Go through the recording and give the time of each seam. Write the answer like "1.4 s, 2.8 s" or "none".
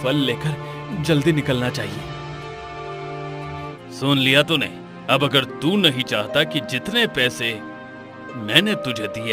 3.6 s